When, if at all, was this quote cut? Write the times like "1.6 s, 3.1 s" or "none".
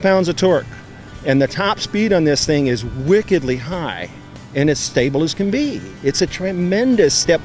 none